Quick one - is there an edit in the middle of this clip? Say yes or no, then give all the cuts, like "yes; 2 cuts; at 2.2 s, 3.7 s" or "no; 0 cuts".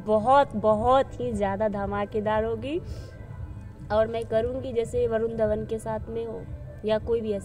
no; 0 cuts